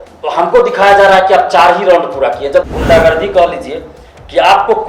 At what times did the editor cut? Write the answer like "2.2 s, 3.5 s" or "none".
2.7 s